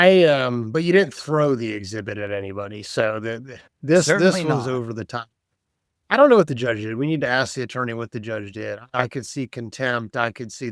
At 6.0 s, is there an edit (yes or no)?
no